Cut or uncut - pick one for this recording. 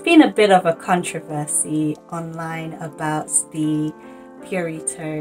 uncut